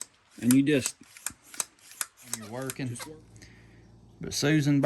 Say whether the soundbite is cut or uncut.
cut